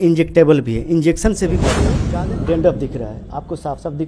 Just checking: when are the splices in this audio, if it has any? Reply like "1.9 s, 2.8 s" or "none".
1.9 s

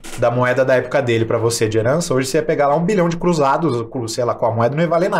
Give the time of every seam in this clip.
none

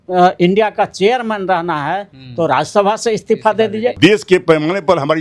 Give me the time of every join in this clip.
4.0 s

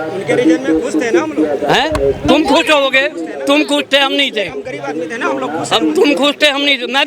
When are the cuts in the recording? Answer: none

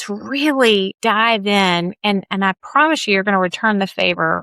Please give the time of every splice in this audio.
0.9 s

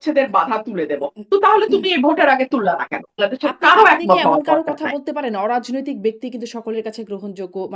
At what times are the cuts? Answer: 3.2 s

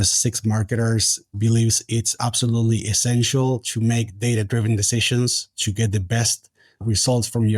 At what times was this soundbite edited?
1.3 s, 6.8 s

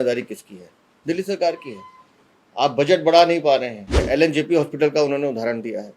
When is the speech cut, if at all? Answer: 3.9 s

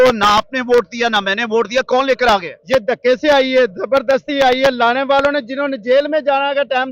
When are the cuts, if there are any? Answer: none

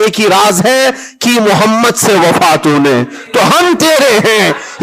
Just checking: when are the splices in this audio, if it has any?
none

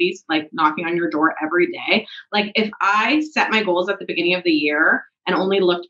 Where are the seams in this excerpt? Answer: none

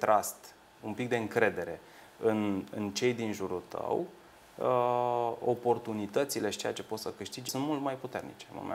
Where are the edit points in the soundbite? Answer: 7.5 s

